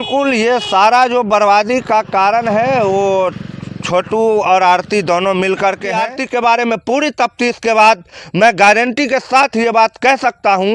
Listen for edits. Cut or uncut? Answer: cut